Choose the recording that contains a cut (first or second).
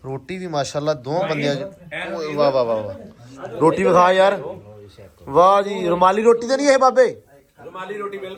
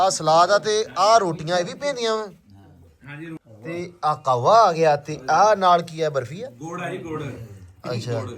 second